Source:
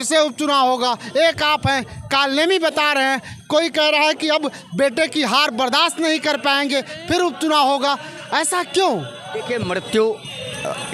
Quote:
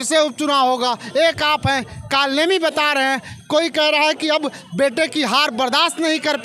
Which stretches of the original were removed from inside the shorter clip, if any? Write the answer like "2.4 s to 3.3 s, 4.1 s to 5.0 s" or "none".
none